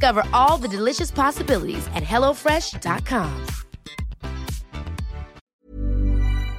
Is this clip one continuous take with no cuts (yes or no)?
no